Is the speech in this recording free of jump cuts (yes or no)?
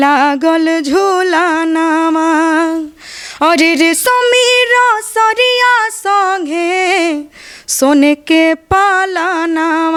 yes